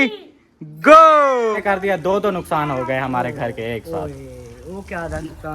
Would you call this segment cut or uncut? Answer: cut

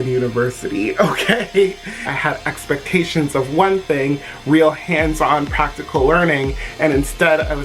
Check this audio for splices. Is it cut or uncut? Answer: cut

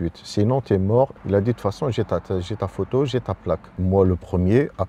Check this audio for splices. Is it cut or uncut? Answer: cut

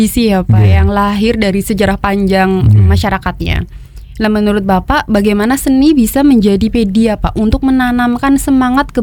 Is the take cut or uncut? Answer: uncut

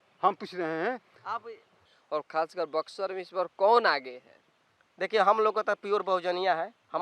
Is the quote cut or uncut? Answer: cut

